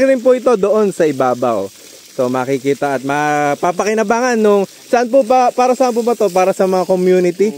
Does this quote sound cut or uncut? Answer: uncut